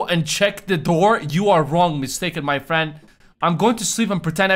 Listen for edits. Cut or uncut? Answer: uncut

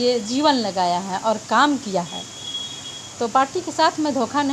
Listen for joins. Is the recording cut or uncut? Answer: uncut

